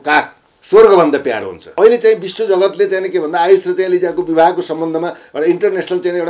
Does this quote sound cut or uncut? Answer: cut